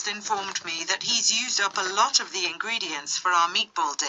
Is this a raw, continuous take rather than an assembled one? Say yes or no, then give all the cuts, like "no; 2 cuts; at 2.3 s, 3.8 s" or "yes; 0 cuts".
yes; 0 cuts